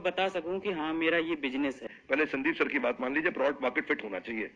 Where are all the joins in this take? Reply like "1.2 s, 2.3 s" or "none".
1.9 s

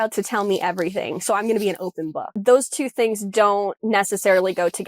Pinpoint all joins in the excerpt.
2.4 s

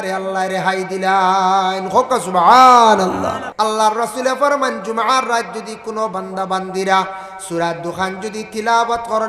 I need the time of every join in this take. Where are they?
3.4 s

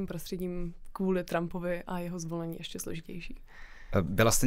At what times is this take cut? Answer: none

